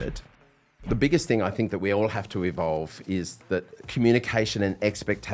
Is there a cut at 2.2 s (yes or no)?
no